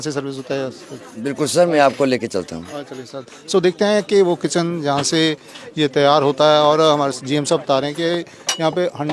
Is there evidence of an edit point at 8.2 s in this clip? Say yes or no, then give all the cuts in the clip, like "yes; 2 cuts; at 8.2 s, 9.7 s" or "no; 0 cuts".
no; 0 cuts